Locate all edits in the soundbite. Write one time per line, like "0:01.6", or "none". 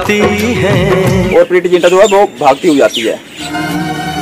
0:01.3
0:03.4